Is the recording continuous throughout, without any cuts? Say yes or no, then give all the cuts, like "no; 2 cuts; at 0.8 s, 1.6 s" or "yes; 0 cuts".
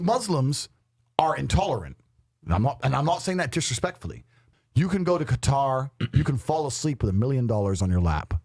no; 1 cut; at 4.4 s